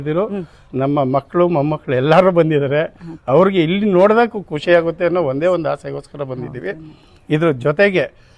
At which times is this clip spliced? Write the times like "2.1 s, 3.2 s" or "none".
none